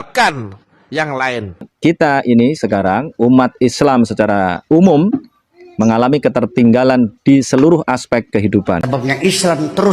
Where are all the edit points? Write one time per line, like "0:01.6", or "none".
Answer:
0:01.7
0:08.9